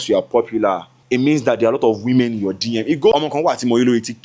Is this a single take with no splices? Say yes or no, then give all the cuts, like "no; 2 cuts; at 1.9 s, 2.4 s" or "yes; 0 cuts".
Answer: no; 2 cuts; at 0.9 s, 3.1 s